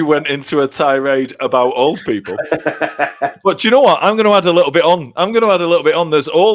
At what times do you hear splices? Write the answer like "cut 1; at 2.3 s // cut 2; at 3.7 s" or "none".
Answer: none